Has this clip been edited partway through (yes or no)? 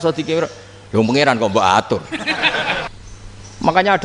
yes